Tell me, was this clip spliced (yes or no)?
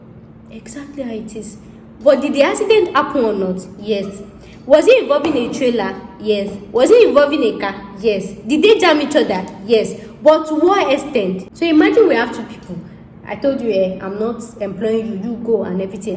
yes